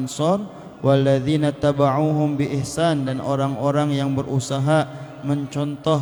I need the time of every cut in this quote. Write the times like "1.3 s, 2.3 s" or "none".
none